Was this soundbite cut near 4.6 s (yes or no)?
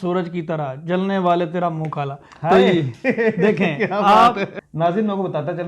yes